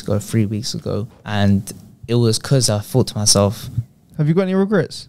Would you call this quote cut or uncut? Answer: cut